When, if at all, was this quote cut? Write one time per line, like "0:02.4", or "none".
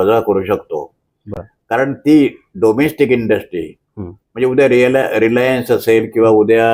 none